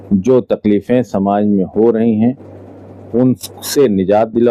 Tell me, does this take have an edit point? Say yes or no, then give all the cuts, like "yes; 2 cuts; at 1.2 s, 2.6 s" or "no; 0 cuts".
no; 0 cuts